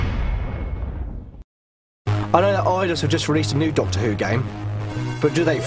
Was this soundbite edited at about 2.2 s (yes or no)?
yes